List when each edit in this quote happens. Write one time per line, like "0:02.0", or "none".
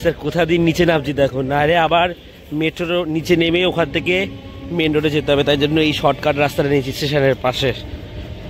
none